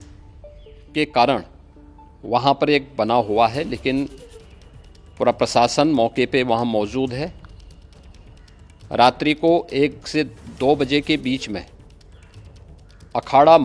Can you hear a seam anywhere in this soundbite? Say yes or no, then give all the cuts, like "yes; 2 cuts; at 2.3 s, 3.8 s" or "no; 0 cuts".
no; 0 cuts